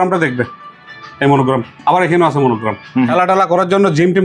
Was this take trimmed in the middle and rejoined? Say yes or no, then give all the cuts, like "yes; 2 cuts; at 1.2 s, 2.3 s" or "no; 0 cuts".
yes; 1 cut; at 3.1 s